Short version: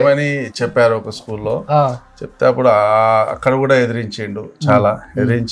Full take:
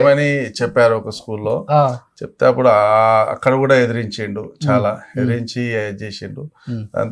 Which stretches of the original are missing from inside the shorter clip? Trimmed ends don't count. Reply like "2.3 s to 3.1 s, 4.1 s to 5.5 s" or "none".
none